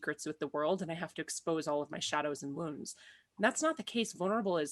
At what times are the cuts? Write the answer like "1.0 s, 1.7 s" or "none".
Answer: none